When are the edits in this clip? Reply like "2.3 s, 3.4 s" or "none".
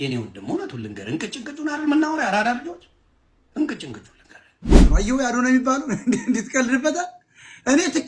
4.8 s